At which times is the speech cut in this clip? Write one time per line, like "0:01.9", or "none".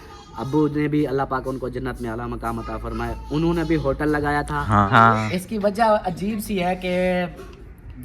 0:04.9